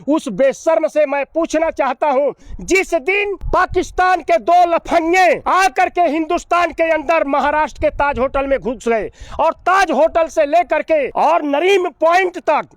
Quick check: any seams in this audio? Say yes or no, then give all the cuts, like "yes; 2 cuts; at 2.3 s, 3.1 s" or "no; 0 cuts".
yes; 4 cuts; at 2.5 s, 3.4 s, 5.4 s, 11.1 s